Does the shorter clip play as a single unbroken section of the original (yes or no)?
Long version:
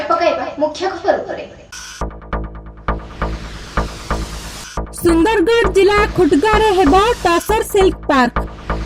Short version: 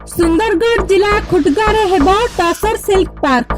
yes